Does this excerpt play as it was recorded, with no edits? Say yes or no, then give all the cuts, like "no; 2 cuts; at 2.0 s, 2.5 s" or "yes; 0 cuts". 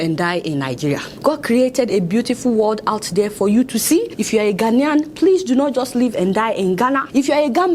yes; 0 cuts